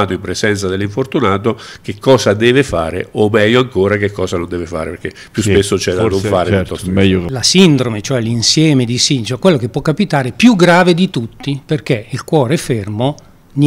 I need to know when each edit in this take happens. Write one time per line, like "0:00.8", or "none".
0:07.3